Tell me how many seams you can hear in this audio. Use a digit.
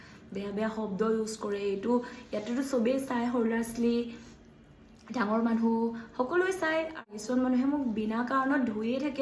1